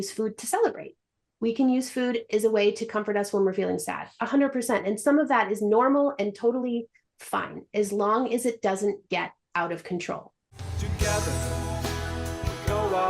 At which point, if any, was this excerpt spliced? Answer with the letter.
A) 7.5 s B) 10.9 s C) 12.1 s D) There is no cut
B